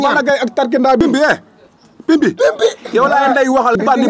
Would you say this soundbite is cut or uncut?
cut